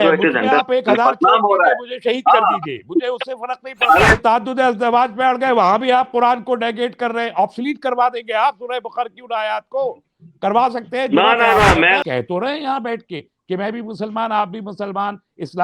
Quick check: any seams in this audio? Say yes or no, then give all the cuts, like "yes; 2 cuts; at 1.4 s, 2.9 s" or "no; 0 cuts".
yes; 2 cuts; at 4.2 s, 12.0 s